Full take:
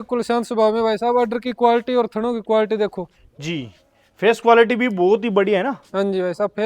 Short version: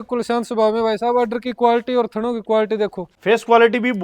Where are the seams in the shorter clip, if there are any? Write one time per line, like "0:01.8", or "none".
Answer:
0:03.1